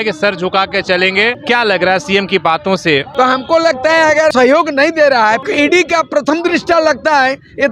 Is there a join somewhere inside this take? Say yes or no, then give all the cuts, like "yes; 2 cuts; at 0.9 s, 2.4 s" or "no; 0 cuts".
yes; 4 cuts; at 1.4 s, 3.1 s, 4.3 s, 5.4 s